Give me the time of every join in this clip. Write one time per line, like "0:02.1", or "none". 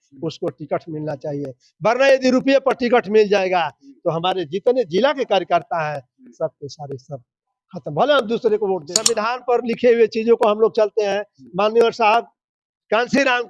0:09.0